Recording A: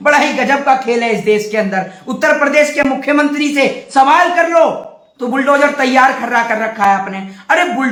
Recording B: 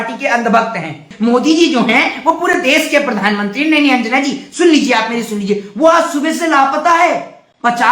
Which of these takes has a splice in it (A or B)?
B